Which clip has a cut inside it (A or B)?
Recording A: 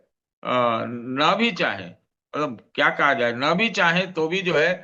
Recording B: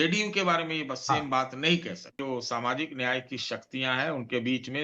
B